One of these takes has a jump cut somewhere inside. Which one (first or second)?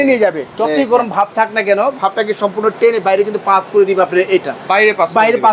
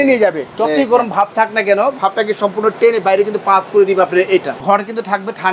second